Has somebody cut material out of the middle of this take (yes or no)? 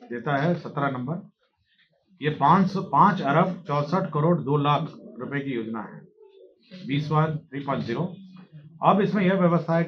no